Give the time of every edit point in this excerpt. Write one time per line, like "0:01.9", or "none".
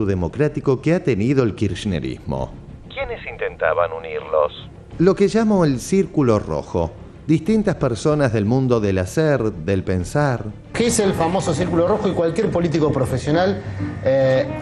0:02.6
0:10.6